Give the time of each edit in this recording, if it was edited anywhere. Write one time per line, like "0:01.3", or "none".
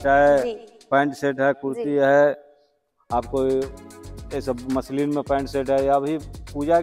none